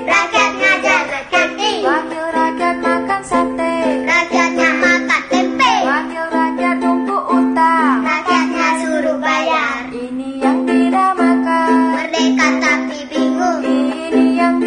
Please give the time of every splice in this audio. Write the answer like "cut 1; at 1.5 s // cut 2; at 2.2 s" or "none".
none